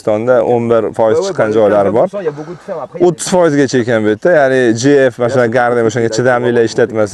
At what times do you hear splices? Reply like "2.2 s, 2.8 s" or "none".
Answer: none

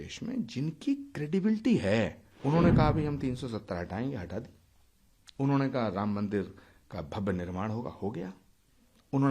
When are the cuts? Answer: 2.3 s

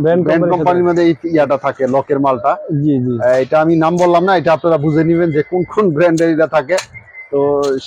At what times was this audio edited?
none

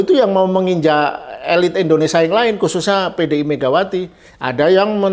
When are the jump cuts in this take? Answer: none

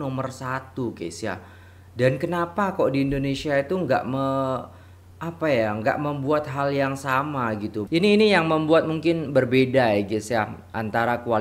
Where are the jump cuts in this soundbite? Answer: 7.8 s

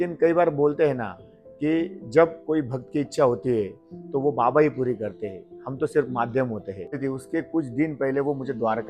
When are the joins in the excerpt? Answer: 7.0 s

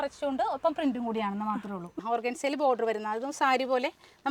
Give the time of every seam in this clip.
1.9 s

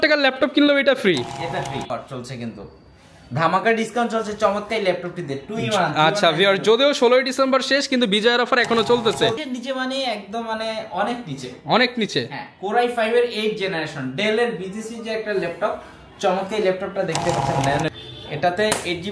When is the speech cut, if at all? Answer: 1.9 s, 9.4 s, 17.9 s

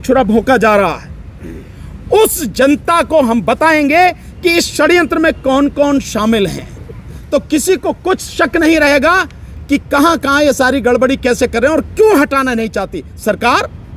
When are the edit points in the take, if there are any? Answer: 7.2 s

